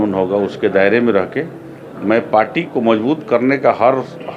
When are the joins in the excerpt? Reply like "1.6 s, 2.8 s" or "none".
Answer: none